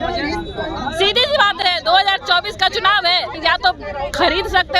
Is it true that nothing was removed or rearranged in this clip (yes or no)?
no